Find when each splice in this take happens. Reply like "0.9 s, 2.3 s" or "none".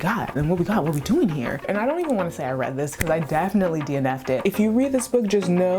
1.7 s, 4.4 s